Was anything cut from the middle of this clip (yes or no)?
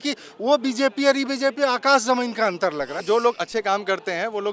yes